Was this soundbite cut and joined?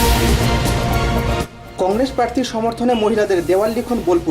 yes; 1 cut; at 1.5 s

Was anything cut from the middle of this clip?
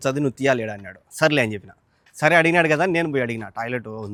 no; 0 cuts

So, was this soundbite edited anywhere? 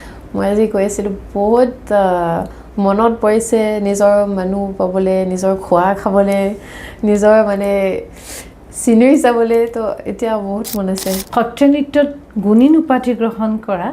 yes; 1 cut; at 11.2 s

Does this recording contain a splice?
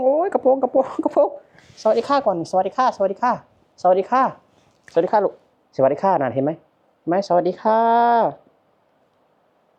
no; 0 cuts

